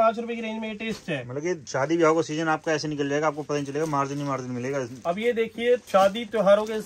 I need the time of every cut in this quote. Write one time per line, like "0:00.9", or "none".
0:01.6
0:04.9
0:05.8

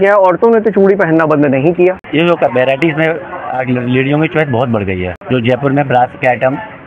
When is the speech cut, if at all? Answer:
0:02.0
0:05.2

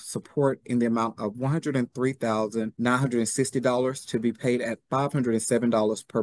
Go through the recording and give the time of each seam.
0:02.7

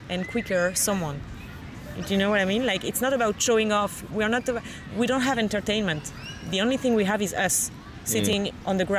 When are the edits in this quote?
none

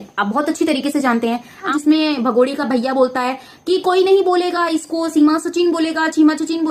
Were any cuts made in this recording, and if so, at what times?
0:01.7

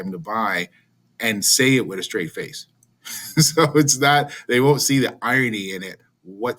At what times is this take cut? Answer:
none

